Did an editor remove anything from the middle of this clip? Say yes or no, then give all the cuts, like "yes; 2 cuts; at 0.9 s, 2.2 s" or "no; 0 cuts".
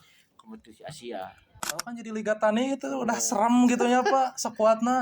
yes; 1 cut; at 1.6 s